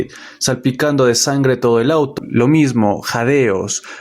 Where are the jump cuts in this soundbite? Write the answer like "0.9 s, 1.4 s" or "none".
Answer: 2.1 s